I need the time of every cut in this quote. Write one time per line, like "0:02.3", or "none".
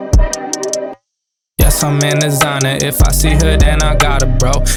none